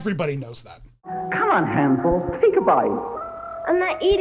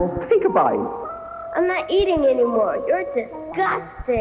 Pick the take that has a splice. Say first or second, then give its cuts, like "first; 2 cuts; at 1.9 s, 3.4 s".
first; 1 cut; at 1.1 s